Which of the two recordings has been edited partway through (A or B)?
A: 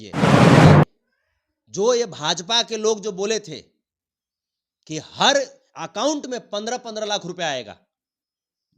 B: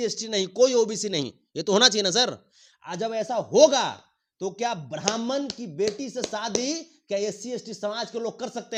A